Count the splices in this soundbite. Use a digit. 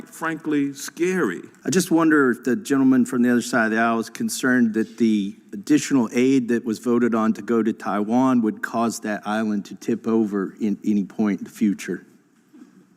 1